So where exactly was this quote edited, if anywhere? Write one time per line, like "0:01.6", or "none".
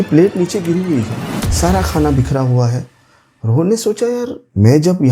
none